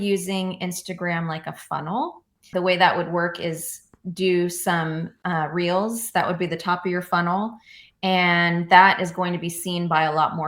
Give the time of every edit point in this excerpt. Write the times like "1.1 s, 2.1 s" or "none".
2.4 s